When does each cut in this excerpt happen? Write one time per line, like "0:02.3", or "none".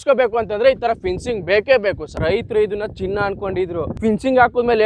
0:02.1
0:03.9